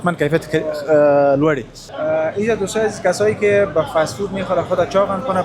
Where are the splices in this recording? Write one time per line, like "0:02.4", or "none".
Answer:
0:01.8